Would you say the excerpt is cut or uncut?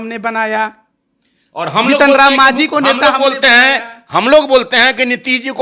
uncut